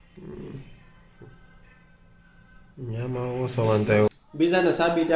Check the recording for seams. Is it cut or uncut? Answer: cut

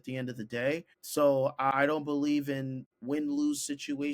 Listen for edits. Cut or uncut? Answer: cut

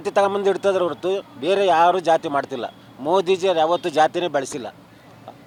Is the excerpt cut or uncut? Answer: uncut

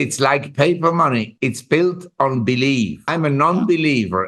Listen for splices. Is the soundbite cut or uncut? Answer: cut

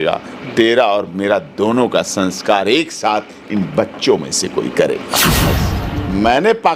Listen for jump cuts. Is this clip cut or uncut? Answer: cut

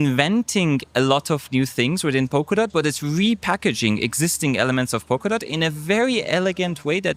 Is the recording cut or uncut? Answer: uncut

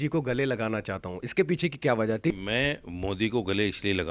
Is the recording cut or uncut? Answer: cut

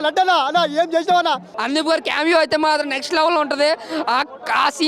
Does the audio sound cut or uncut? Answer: cut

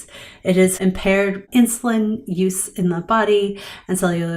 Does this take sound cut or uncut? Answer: cut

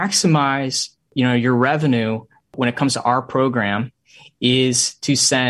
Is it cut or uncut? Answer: cut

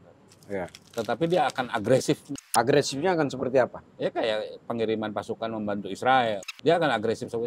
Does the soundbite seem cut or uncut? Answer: cut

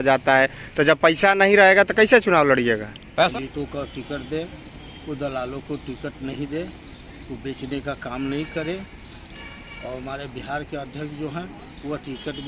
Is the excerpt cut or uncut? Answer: cut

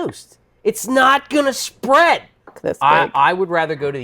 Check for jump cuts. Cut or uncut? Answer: cut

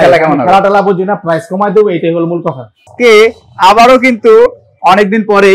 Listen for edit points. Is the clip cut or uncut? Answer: cut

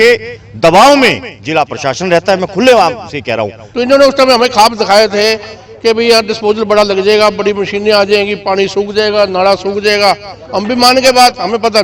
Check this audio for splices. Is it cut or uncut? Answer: cut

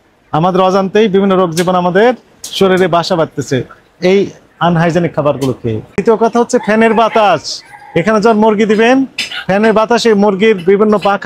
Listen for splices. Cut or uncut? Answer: cut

